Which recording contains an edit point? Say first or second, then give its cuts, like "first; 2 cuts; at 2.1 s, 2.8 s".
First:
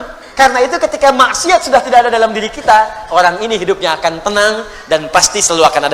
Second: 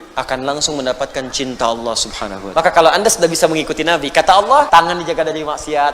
second; 2 cuts; at 2.3 s, 4.7 s